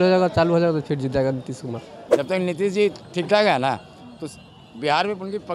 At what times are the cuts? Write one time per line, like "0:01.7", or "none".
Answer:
0:02.0